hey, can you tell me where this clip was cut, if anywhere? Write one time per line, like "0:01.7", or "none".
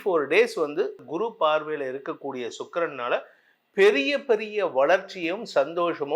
0:01.0